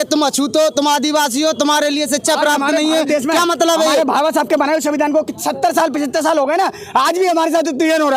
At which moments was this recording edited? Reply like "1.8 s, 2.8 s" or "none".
none